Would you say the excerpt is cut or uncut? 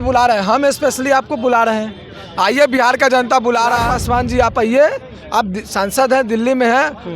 cut